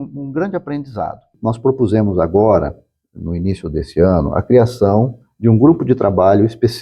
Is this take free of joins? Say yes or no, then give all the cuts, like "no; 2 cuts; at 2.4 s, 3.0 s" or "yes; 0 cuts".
no; 1 cut; at 1.3 s